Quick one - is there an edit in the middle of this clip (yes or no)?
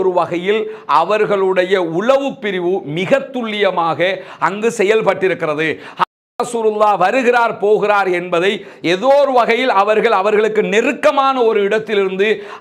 no